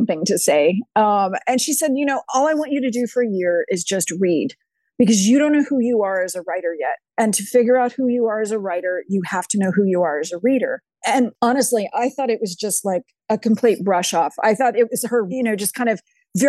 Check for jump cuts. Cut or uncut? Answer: cut